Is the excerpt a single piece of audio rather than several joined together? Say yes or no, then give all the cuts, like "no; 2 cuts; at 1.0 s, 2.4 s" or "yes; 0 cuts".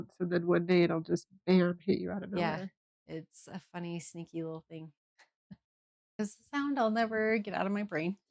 no; 1 cut; at 6.1 s